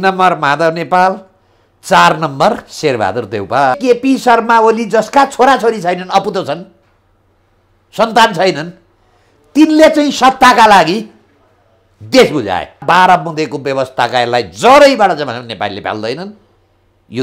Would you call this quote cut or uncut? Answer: cut